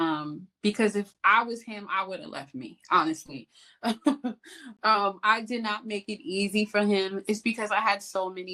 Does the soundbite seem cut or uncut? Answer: uncut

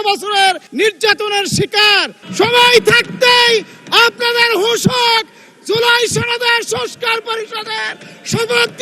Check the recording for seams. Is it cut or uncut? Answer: cut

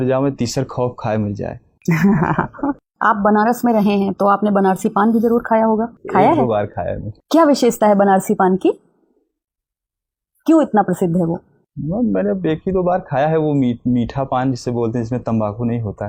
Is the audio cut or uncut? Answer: uncut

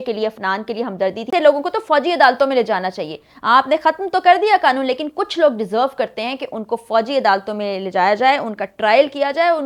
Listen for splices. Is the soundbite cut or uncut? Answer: cut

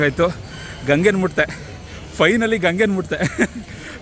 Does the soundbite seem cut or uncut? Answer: uncut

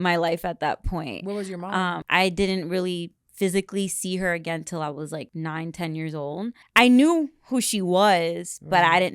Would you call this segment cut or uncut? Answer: cut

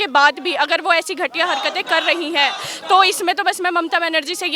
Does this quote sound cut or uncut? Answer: uncut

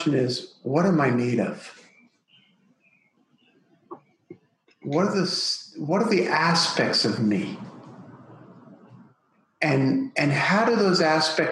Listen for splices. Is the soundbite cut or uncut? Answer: uncut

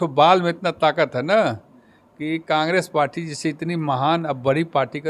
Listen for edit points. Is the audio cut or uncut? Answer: uncut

